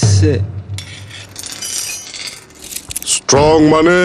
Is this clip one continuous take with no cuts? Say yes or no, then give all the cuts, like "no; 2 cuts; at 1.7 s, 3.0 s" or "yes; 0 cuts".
no; 1 cut; at 2.1 s